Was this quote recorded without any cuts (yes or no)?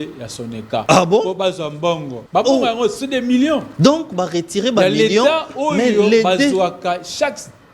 no